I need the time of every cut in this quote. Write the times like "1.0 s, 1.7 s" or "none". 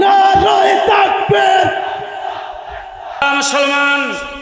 3.1 s